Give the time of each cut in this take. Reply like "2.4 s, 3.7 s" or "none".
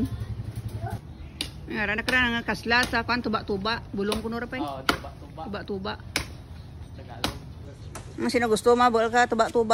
1.0 s, 7.7 s